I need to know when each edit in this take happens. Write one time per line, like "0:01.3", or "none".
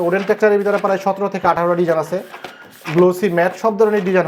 none

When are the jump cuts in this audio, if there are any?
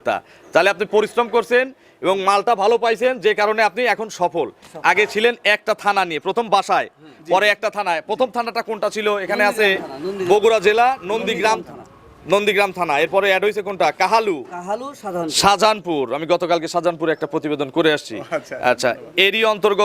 none

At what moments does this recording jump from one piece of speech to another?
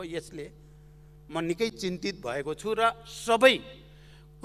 none

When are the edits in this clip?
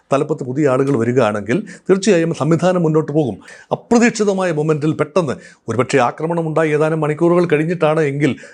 0:03.5

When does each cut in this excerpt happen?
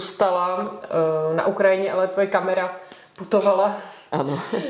none

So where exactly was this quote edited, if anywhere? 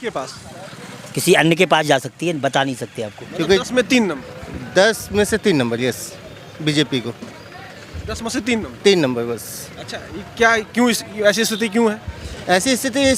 0:03.2

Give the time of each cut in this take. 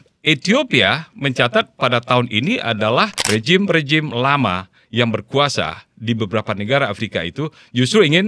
0:03.2

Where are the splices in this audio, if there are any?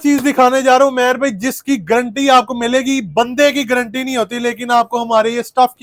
none

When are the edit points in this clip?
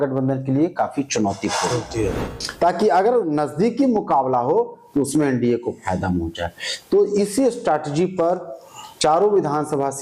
0:02.1

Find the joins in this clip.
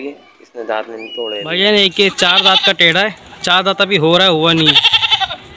0:01.5

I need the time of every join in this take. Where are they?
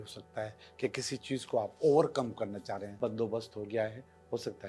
0:02.9

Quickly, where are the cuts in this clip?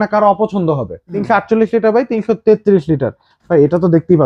0:01.1

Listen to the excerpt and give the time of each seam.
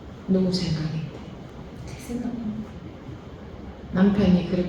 0:01.5

